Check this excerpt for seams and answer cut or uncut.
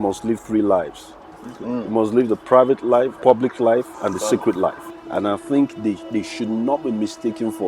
cut